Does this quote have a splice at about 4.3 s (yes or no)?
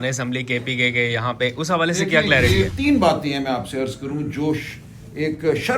no